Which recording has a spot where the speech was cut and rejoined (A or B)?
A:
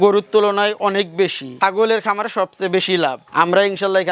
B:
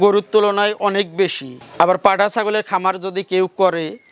A